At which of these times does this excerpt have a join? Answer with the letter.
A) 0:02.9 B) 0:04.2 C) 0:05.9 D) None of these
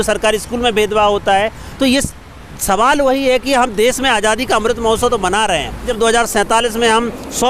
C